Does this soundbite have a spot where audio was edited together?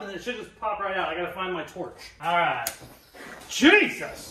no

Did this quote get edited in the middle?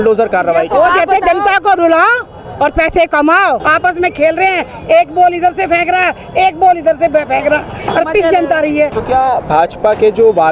yes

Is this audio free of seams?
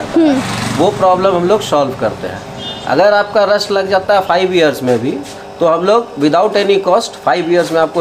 yes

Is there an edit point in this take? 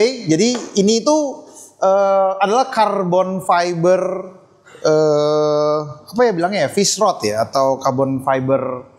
no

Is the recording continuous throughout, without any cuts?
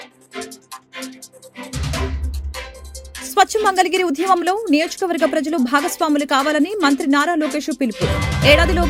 yes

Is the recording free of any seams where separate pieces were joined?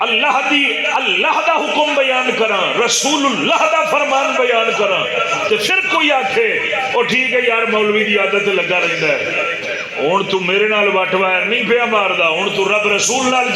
yes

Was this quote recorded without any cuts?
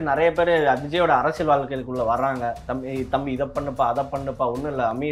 yes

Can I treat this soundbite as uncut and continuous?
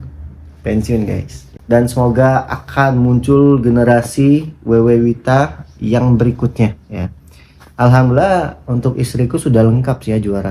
no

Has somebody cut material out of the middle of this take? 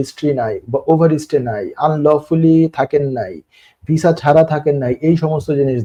no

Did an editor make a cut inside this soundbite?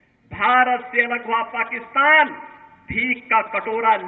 no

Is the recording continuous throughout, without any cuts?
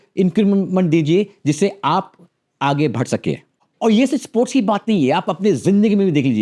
yes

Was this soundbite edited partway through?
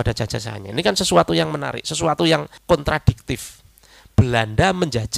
yes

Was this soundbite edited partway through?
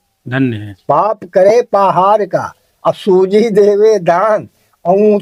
no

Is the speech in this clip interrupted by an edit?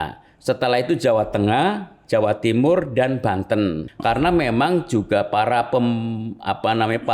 yes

